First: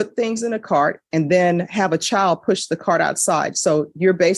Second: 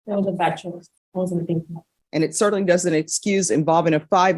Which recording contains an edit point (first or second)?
second